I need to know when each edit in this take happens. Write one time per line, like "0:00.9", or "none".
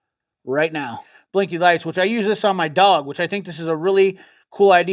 0:01.1